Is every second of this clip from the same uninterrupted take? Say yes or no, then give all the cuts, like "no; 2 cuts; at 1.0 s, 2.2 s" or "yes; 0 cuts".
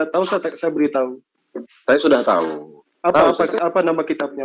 yes; 0 cuts